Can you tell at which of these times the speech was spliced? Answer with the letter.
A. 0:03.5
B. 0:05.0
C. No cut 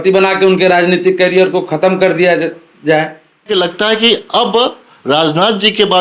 A